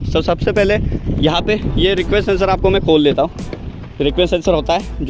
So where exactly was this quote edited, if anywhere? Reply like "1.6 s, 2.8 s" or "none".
none